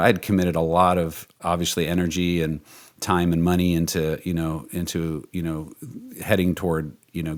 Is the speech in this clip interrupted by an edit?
no; 0 cuts

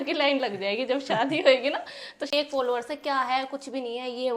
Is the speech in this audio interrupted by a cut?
yes; 1 cut; at 2.3 s

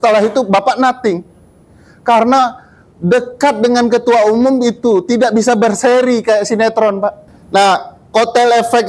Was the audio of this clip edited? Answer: yes; 1 cut; at 7.3 s

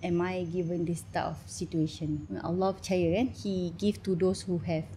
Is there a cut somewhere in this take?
yes; 2 cuts; at 2.3 s, 3.4 s

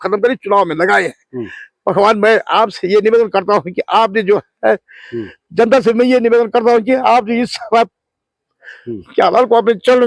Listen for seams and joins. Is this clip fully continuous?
yes; 0 cuts

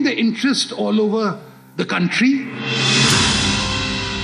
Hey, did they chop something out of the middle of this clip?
yes; 1 cut; at 2.6 s

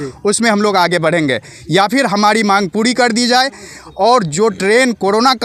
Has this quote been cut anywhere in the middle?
no; 0 cuts

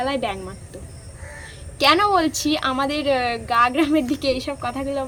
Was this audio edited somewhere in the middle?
no; 0 cuts

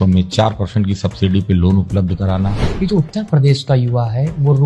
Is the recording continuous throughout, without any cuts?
no; 1 cut; at 2.6 s

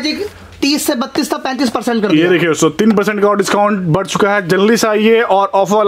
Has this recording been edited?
no; 0 cuts

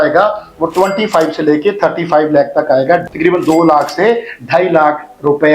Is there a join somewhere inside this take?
yes; 1 cut; at 3.1 s

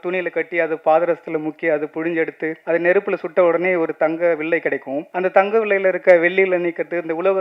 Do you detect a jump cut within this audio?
yes; 2 cuts; at 2.6 s, 5.0 s

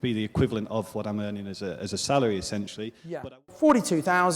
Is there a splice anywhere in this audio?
yes; 1 cut; at 3.2 s

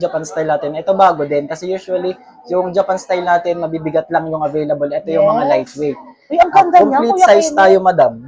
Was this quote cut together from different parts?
no; 0 cuts

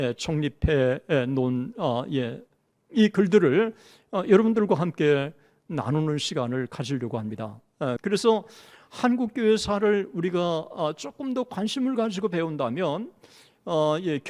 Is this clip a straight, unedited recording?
no; 1 cut; at 8.0 s

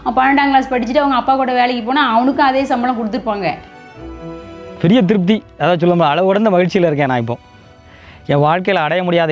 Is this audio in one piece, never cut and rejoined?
no; 1 cut; at 4.1 s

